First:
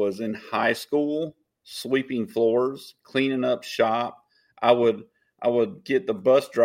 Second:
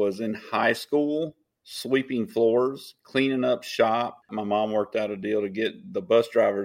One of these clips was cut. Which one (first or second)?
second